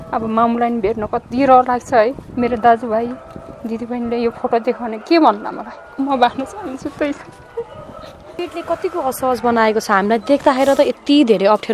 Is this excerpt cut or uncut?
cut